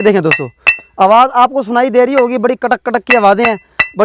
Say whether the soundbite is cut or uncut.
uncut